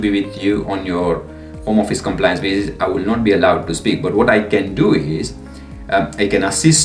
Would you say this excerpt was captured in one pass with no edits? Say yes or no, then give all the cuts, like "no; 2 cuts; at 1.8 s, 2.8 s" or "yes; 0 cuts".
yes; 0 cuts